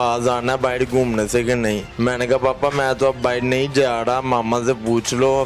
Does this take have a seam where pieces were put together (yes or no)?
yes